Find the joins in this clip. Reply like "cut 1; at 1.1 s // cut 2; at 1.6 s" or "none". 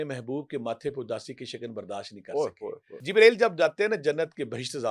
cut 1; at 3.0 s

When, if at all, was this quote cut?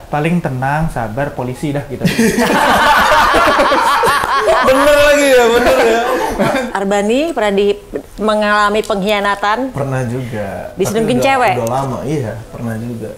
cut 1; at 6.6 s

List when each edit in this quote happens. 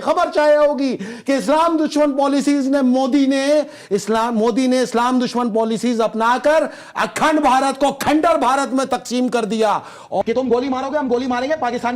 cut 1; at 10.2 s

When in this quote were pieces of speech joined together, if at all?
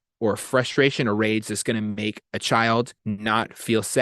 cut 1; at 3.0 s

